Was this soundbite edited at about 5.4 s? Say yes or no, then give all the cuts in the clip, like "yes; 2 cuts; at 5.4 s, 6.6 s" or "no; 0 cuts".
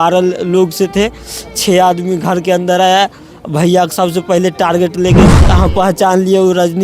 yes; 1 cut; at 5.4 s